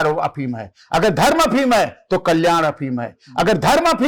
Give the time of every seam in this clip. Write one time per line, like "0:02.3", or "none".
none